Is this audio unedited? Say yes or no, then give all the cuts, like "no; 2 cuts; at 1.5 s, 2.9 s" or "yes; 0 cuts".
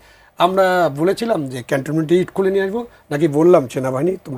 yes; 0 cuts